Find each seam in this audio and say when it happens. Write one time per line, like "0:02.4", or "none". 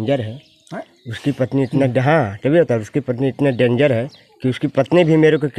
none